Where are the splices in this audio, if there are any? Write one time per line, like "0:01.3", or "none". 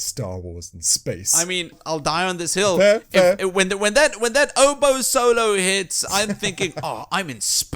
0:01.8